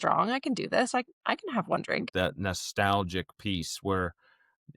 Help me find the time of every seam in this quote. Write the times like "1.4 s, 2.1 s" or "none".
2.1 s